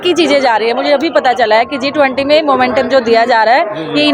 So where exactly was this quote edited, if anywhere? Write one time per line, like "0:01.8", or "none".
none